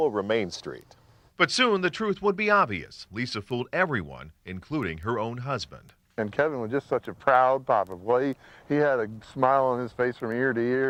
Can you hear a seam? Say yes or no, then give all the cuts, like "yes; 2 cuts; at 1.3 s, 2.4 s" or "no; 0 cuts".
no; 0 cuts